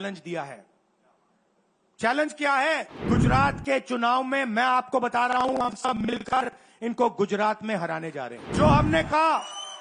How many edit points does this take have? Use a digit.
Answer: 2